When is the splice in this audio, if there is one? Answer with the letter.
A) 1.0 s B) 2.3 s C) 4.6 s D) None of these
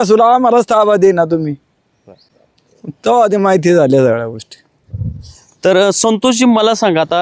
D